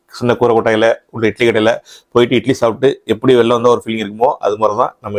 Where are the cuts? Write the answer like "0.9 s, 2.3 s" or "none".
none